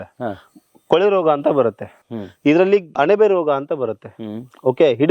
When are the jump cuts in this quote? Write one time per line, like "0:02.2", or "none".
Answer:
0:02.9